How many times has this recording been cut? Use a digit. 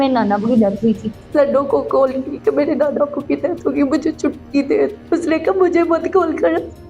2